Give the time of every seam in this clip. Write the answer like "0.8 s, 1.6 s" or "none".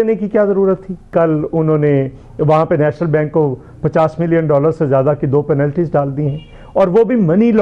1.1 s